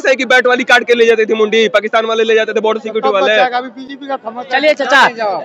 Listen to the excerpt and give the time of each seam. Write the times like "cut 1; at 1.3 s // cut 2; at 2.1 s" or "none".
none

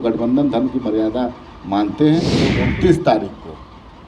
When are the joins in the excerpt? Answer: cut 1; at 2.6 s

